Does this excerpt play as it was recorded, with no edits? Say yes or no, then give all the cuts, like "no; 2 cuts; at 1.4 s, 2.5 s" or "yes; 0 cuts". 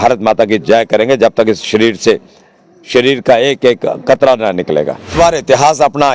no; 1 cut; at 5.1 s